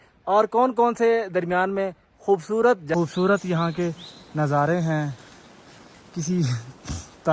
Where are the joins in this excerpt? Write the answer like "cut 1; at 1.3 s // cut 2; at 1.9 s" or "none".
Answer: cut 1; at 2.9 s